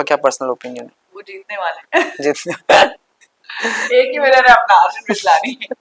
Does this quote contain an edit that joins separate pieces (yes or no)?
no